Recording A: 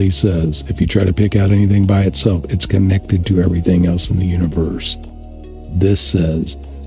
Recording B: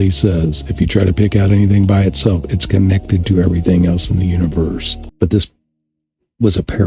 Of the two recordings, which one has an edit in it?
B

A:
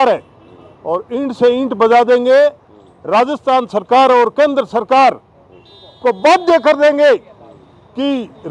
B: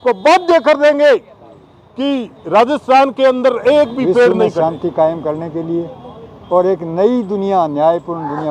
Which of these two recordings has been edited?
B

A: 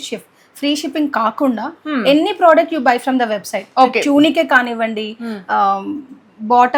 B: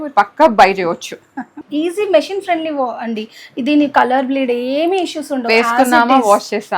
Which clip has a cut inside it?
B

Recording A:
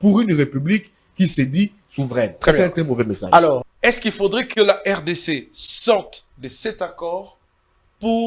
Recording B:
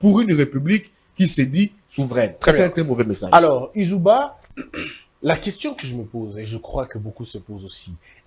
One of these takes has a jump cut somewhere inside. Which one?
A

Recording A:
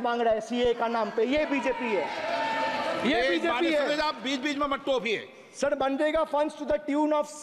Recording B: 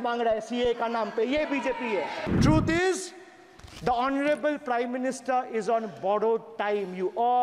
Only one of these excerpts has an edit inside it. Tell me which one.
B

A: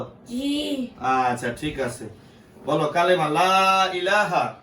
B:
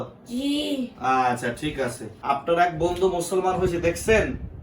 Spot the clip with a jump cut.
B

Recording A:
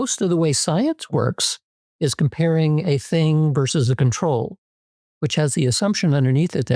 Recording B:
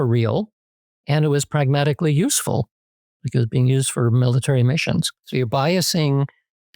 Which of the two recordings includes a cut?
B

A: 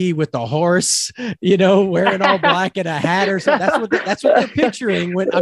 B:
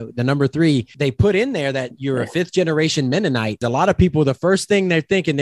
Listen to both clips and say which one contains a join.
B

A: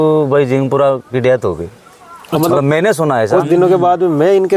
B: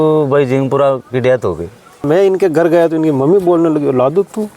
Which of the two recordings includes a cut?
B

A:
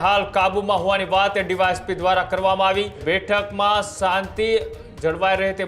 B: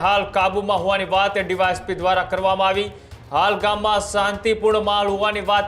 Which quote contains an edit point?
A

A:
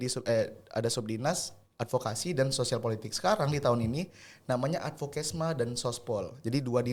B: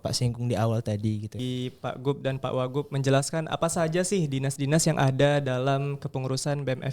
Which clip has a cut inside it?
B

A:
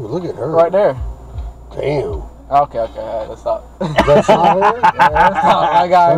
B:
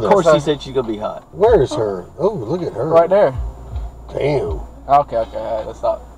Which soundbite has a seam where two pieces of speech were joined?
B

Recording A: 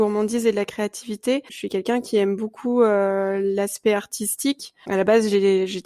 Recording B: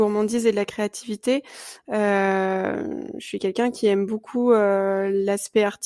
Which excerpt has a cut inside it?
A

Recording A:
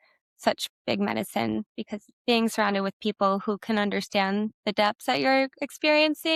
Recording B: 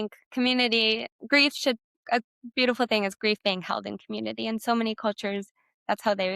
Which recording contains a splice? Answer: B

